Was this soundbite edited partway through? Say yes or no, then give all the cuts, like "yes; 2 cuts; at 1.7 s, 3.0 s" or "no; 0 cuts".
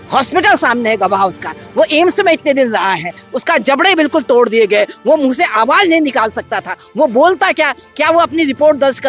no; 0 cuts